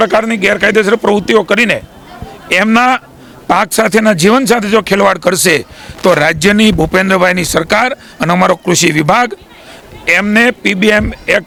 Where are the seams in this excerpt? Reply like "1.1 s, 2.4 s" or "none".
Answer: none